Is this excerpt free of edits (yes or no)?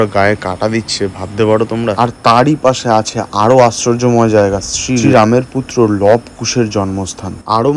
yes